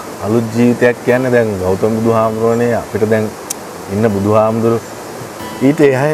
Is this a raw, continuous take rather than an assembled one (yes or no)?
yes